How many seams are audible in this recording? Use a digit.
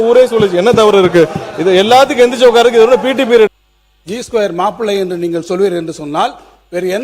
1